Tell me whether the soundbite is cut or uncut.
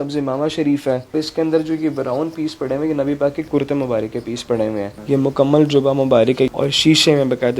cut